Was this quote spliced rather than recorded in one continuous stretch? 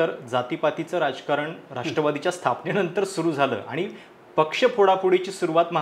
no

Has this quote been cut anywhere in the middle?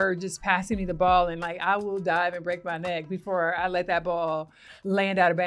no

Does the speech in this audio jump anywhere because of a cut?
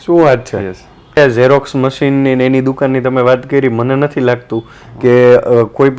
yes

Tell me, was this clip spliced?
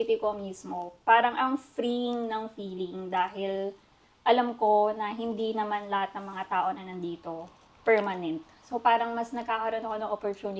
no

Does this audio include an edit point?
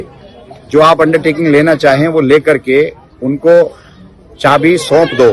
no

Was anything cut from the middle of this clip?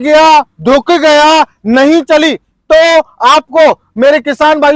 no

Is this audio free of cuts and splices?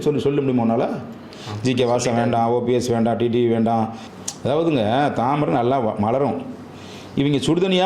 no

